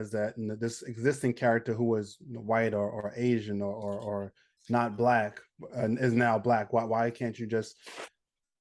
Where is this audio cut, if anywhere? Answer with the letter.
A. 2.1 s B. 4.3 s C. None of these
C